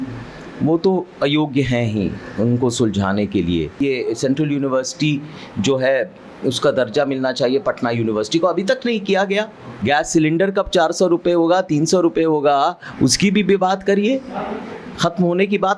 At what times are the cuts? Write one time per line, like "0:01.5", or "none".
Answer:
0:03.8
0:09.7